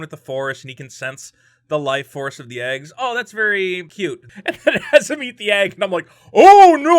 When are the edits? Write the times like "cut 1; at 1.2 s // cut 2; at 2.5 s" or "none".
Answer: cut 1; at 4.2 s